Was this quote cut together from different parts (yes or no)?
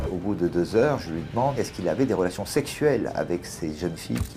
yes